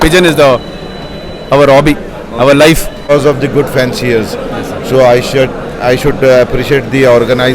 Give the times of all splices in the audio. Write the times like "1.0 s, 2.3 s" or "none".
3.1 s

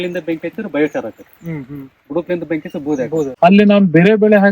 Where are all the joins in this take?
3.3 s

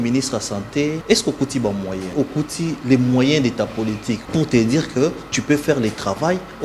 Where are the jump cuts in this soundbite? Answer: 1.0 s, 2.1 s, 4.2 s

